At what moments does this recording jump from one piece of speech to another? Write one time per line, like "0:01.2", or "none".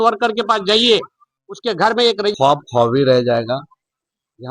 0:02.4